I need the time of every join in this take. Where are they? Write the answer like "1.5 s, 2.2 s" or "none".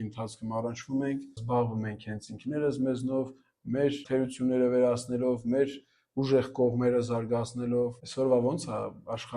1.4 s, 4.0 s, 8.0 s